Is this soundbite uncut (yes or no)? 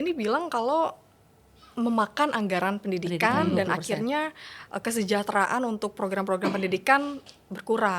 yes